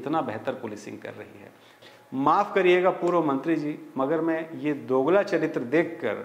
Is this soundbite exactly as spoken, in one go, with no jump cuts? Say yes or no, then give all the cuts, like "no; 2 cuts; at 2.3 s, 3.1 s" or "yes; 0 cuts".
no; 1 cut; at 1.7 s